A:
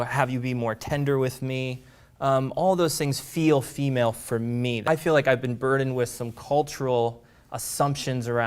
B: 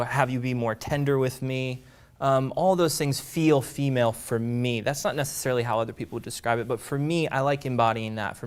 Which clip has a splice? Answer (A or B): A